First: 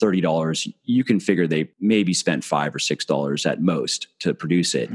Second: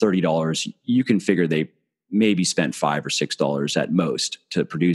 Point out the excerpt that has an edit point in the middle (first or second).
first